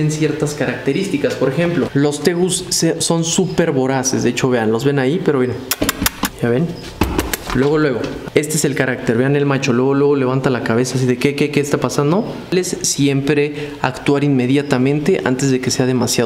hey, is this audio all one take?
no; 3 cuts; at 6.3 s, 8.2 s, 12.5 s

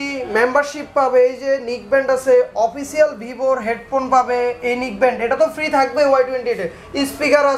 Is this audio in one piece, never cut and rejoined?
yes; 0 cuts

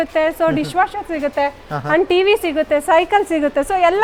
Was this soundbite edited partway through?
no; 0 cuts

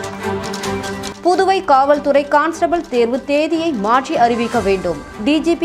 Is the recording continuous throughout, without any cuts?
no; 1 cut; at 1.1 s

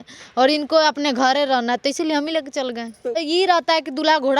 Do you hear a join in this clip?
yes; 1 cut; at 3.2 s

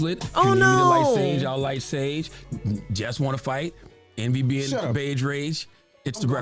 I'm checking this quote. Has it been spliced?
no; 0 cuts

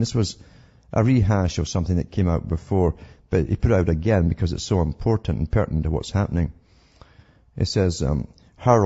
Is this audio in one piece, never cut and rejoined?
yes; 0 cuts

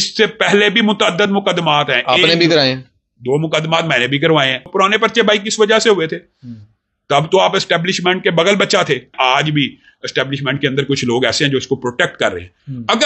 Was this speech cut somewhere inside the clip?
yes; 2 cuts; at 4.6 s, 9.1 s

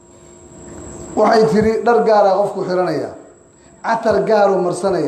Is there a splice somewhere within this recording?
no; 0 cuts

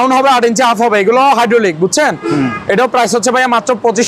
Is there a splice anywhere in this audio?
no; 0 cuts

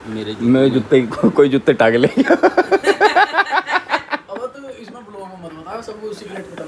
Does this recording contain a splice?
no; 0 cuts

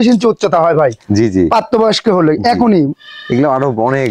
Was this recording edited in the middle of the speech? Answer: no; 0 cuts

